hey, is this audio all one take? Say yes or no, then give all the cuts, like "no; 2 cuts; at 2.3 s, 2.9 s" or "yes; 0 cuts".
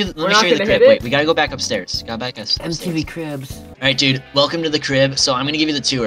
yes; 0 cuts